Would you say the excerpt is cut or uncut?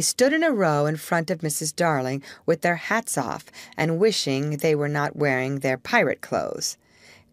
uncut